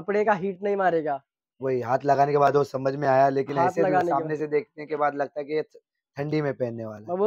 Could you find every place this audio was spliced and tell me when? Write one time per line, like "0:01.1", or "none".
none